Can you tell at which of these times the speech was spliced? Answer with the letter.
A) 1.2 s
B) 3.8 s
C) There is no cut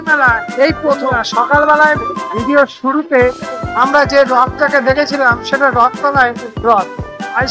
A